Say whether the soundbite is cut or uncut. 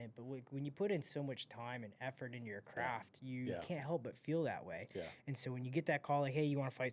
uncut